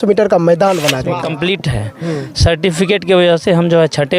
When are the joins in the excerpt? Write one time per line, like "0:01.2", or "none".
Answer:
0:01.1